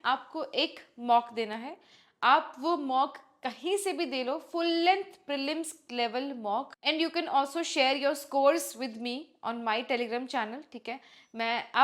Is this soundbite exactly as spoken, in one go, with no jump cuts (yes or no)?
no